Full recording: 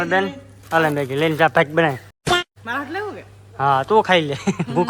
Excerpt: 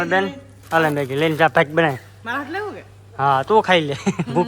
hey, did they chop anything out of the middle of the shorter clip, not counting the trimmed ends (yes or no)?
yes